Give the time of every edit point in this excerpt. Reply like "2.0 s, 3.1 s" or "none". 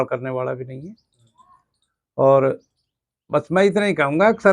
none